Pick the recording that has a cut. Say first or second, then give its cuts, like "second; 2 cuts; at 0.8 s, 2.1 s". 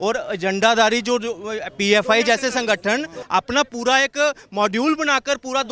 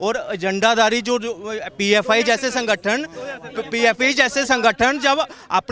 first; 1 cut; at 3.2 s